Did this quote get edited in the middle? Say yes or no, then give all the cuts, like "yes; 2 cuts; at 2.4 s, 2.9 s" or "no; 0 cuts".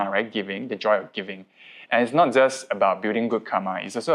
no; 0 cuts